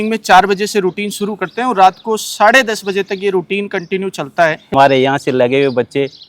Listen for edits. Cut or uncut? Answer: cut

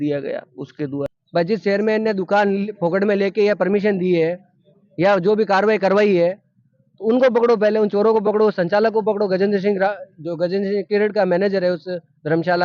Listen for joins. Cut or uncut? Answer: cut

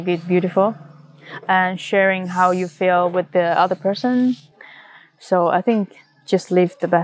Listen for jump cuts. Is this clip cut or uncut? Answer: cut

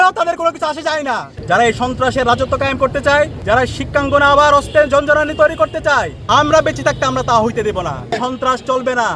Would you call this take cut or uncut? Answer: cut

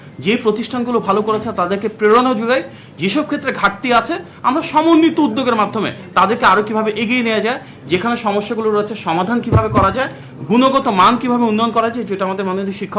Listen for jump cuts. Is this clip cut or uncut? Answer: uncut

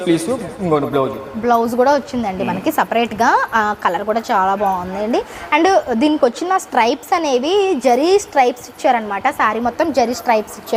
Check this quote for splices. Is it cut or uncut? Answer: uncut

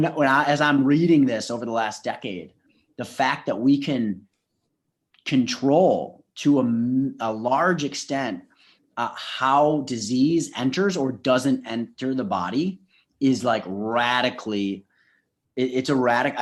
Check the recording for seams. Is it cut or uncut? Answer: uncut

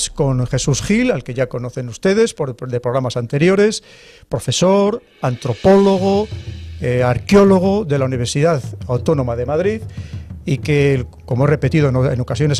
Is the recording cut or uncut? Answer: uncut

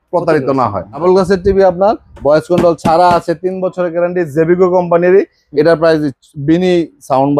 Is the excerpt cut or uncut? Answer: cut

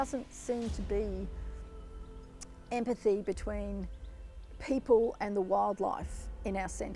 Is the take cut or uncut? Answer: uncut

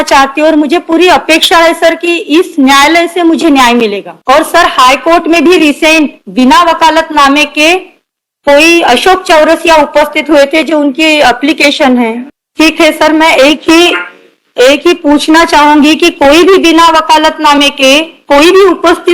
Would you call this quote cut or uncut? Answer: uncut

